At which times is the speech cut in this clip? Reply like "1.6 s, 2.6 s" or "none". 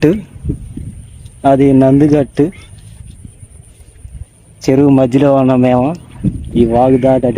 none